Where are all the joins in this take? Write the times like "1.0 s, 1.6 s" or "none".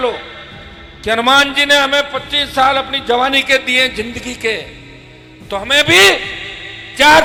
none